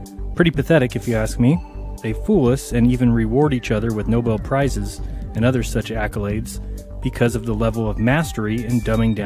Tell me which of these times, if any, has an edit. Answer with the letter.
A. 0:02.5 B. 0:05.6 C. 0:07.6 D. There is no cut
D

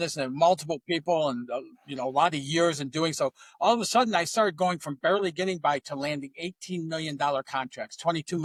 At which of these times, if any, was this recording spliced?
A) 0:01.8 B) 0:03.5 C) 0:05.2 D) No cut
D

